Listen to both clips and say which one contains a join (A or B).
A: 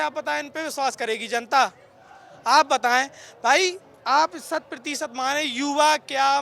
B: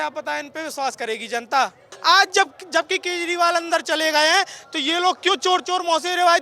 B